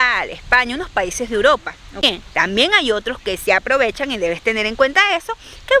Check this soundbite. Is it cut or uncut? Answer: cut